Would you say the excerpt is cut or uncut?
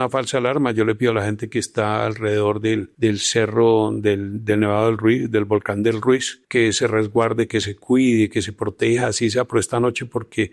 uncut